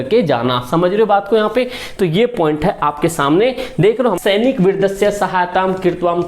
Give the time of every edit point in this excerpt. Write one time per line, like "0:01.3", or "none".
0:04.2